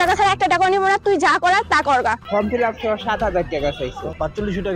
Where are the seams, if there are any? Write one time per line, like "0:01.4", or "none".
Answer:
0:02.2

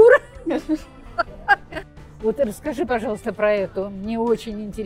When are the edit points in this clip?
0:01.8

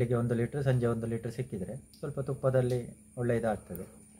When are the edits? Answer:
none

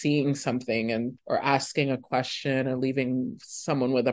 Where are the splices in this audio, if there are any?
0:01.2

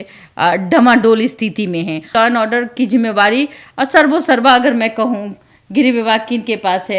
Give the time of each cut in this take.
0:02.1

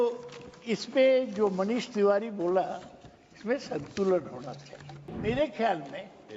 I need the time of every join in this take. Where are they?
0:05.1

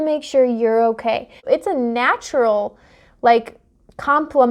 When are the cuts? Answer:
0:01.3

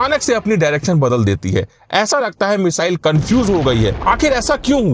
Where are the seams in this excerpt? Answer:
0:04.0

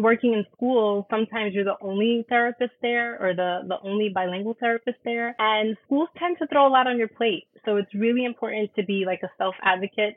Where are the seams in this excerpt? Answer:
0:05.3

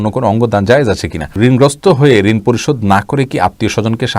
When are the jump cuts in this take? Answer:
0:01.3

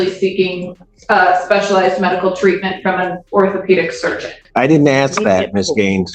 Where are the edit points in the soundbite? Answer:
0:04.4

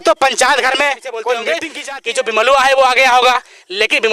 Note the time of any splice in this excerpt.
0:01.4

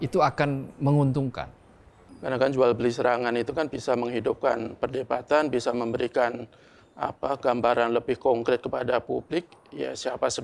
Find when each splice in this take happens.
0:02.2

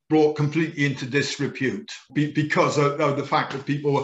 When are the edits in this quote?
0:02.0

